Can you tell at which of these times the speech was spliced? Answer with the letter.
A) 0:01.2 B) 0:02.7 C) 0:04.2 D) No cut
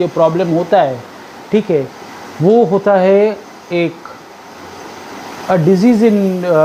D